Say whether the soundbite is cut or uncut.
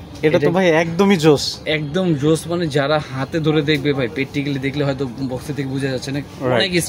uncut